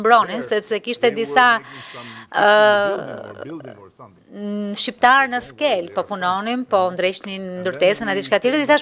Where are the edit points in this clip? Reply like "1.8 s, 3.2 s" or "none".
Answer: none